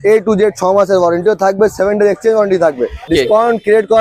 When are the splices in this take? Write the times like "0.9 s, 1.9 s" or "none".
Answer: 3.1 s